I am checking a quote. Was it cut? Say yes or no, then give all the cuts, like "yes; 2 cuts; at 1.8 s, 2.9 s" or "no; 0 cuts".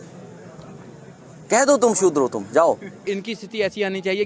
yes; 1 cut; at 3.1 s